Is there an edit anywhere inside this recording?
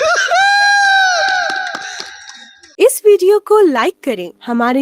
yes; 1 cut; at 2.6 s

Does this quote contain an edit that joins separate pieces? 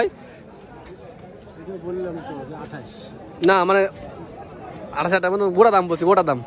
no; 0 cuts

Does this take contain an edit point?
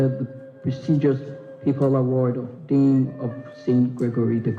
no; 0 cuts

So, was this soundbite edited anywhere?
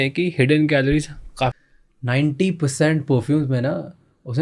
yes; 1 cut; at 1.5 s

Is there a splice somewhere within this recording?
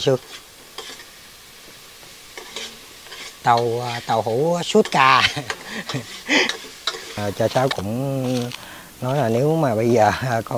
yes; 1 cut; at 7.2 s

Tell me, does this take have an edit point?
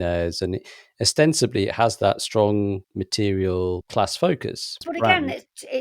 yes; 3 cuts; at 2.9 s, 3.8 s, 4.8 s

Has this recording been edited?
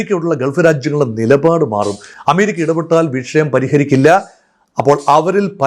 no; 0 cuts

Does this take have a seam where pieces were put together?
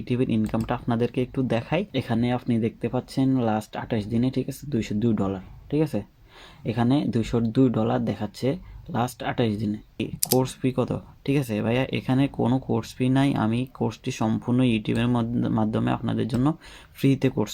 yes; 2 cuts; at 1.9 s, 10.0 s

